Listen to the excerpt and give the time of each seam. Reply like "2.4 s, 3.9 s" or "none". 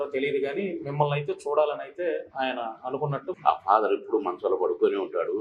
3.4 s